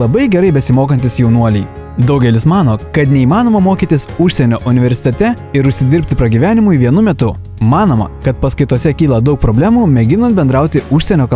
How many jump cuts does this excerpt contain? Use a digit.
2